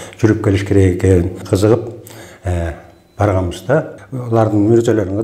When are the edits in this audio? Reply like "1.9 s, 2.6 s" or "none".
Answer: 1.4 s